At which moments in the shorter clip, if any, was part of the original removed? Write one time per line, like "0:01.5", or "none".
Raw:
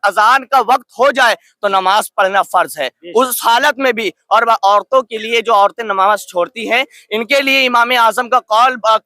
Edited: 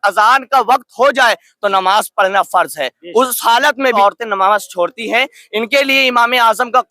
0:04.0

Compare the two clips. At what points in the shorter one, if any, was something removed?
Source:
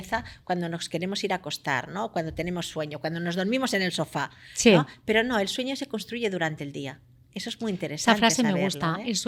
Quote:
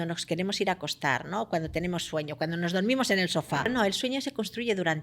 0:03.7

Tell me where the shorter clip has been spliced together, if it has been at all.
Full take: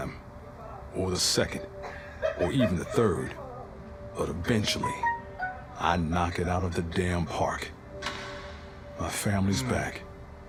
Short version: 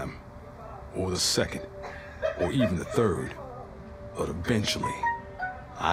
none

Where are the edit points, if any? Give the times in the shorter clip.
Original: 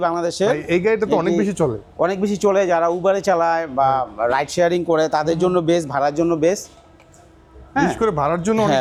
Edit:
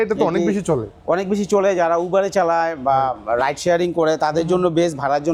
none

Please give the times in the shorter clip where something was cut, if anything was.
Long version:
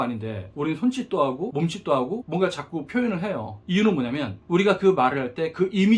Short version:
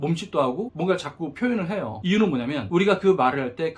0:01.9
0:02.6

